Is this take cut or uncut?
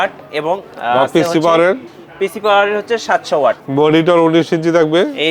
cut